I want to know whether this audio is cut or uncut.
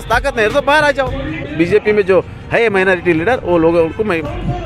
cut